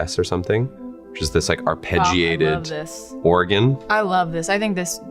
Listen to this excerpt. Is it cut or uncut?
cut